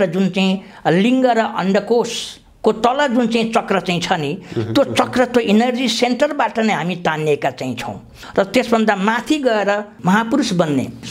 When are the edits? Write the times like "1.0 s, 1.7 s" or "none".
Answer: 8.2 s, 9.9 s